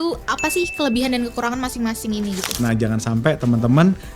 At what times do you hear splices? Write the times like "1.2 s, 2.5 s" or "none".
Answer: 2.4 s